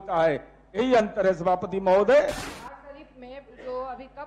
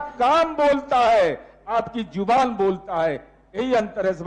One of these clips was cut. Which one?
first; 1 cut; at 2.5 s

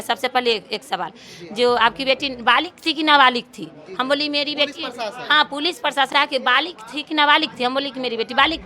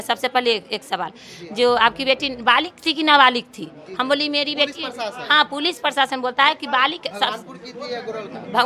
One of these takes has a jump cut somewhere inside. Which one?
first; 1 cut; at 6.1 s

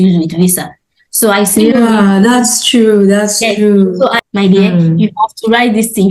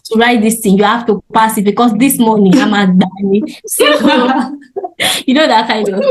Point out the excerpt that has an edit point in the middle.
first; 1 cut; at 4.2 s

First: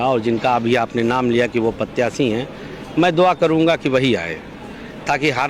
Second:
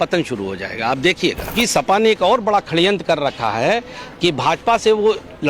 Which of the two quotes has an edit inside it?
second; 1 cut; at 1.5 s

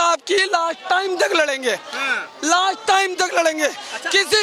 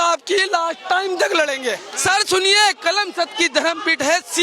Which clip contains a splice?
second; 1 cut; at 1.9 s

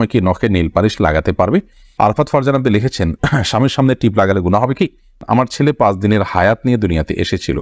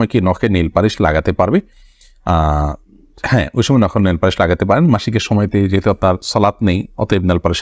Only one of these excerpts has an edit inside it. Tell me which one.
first; 2 cuts; at 2.0 s, 5.2 s

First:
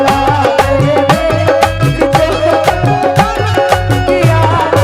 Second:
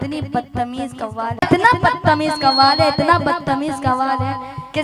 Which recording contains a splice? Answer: second; 1 cut; at 1.5 s

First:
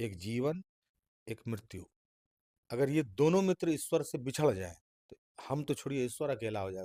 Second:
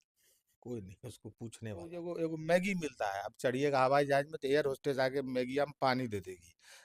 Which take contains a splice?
second; 1 cut; at 2.0 s

